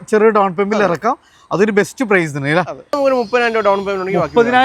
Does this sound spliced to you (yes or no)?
yes